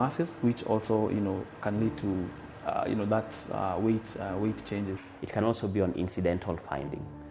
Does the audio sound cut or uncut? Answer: cut